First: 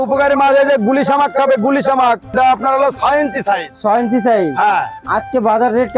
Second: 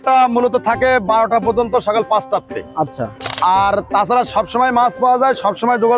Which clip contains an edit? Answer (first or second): first